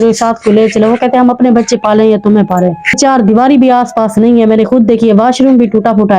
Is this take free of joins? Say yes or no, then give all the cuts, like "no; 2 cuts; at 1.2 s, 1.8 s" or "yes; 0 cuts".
no; 1 cut; at 3.0 s